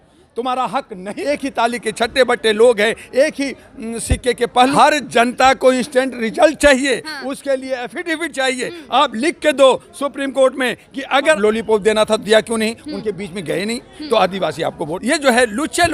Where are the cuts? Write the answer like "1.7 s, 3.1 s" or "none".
1.1 s, 4.8 s, 11.4 s, 14.9 s